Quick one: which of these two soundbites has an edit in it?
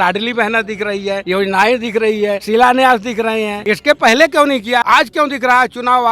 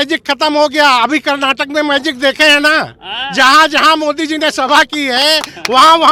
first; 4 cuts; at 1.2 s, 2.4 s, 3.5 s, 4.8 s

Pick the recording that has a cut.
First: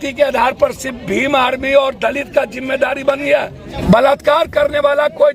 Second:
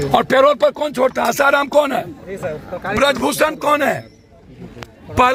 first; 1 cut; at 3.7 s

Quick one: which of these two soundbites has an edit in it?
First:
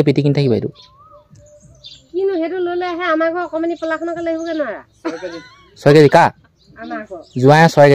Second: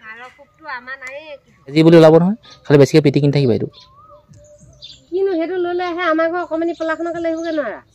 second; 1 cut; at 1.7 s

